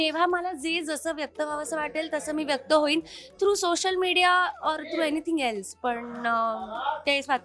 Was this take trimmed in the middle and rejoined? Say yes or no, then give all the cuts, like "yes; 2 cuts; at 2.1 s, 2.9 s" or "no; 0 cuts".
no; 0 cuts